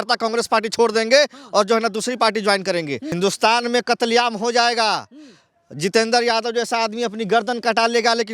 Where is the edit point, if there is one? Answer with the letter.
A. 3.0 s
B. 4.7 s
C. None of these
A